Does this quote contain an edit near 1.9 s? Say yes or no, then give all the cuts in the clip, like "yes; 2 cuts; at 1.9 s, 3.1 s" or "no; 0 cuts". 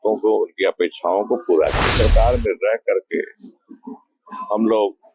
yes; 1 cut; at 1.9 s